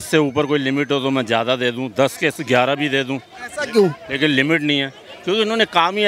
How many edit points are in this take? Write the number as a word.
zero